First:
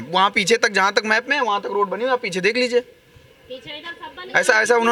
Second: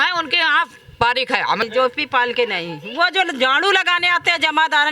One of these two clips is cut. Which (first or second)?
second